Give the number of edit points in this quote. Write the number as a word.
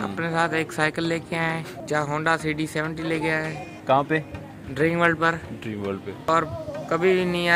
three